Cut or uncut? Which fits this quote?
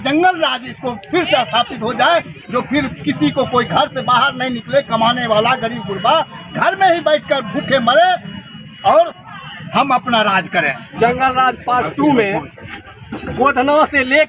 cut